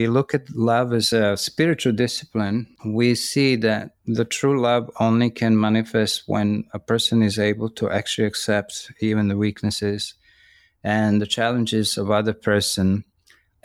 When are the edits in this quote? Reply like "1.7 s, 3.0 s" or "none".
1.1 s, 2.8 s